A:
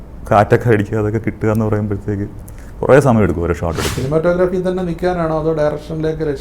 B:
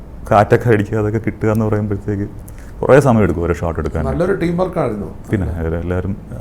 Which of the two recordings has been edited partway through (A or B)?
A